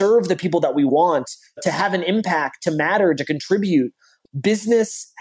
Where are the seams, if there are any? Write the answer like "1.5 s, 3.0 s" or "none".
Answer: 4.1 s